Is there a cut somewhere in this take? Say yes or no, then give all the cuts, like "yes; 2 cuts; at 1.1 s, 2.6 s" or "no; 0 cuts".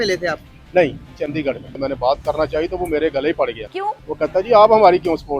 yes; 1 cut; at 1.7 s